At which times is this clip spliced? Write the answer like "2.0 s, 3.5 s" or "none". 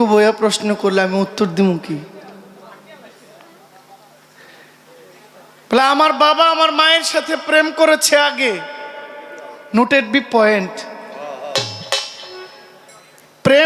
none